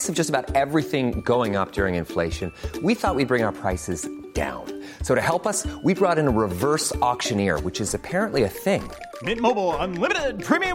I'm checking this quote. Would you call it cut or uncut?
uncut